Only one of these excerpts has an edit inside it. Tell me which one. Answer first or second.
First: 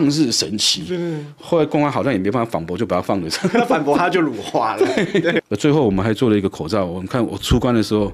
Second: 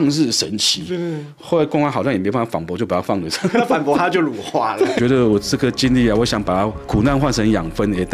second